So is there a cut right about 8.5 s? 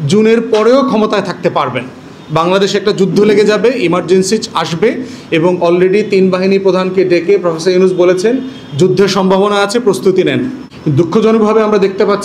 no; 1 cut; at 10.6 s

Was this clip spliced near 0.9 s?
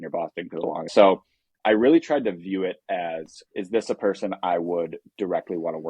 yes; 2 cuts; at 0.9 s, 3.4 s

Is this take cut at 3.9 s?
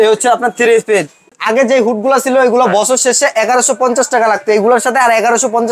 no; 1 cut; at 1.2 s

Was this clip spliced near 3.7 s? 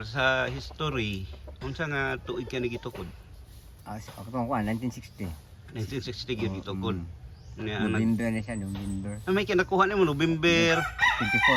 no; 0 cuts

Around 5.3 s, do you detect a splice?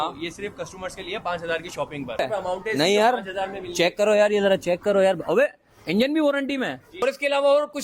no; 2 cuts; at 2.2 s, 7.0 s

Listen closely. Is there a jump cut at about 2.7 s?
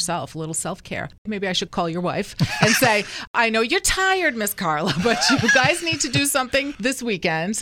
no; 2 cuts; at 1.1 s, 6.7 s

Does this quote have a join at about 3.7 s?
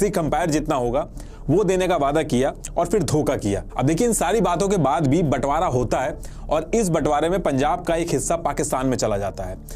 no; 0 cuts

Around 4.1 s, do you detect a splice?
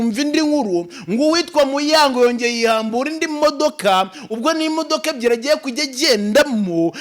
no; 0 cuts

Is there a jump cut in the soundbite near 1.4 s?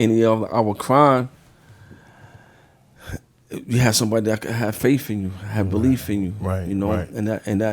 no; 0 cuts

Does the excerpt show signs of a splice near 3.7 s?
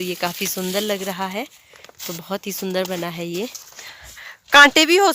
yes; 1 cut; at 3.7 s

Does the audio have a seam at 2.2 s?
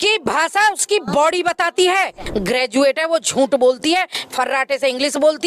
yes; 1 cut; at 2.2 s

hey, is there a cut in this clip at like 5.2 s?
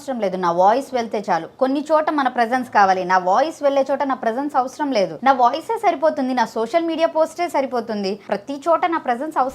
yes; 2 cuts; at 5.2 s, 8.2 s

